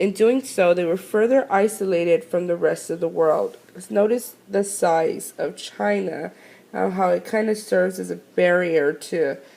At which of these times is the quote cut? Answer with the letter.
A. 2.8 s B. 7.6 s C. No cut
B